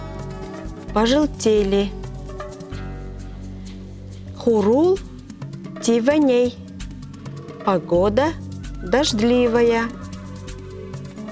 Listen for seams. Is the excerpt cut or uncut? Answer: cut